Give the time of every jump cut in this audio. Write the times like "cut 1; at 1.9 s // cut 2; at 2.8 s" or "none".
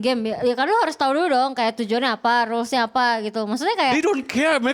none